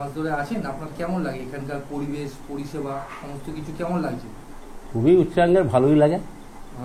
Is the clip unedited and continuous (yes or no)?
yes